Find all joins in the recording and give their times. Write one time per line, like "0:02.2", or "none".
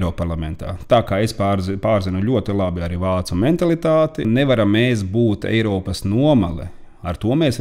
0:04.3